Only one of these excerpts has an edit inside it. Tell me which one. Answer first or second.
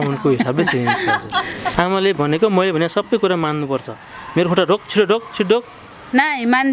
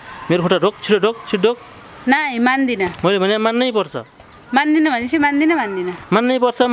first